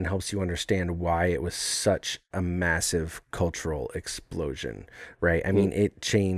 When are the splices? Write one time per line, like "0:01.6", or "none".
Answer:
none